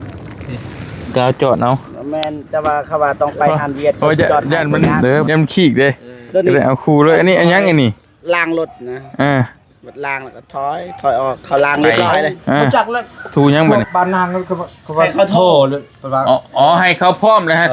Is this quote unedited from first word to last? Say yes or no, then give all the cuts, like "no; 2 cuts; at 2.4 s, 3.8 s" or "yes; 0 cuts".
no; 2 cuts; at 5.3 s, 13.7 s